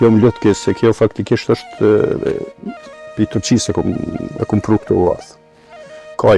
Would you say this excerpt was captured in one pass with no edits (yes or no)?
yes